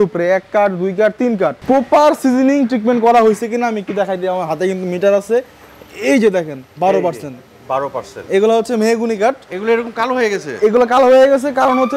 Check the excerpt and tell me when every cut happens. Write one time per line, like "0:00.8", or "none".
0:01.6